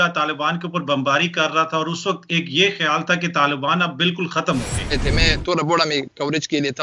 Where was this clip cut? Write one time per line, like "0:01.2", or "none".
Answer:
0:05.0